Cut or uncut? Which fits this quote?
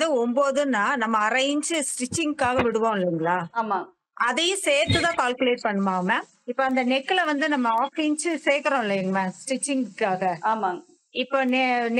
cut